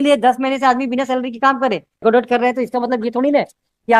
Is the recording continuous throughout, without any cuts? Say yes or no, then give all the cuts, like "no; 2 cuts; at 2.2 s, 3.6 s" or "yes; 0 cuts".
no; 1 cut; at 2.0 s